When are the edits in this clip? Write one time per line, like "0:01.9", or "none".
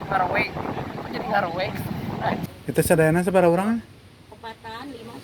0:02.6